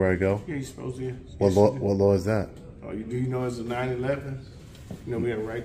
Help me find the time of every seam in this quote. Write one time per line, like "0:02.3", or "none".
none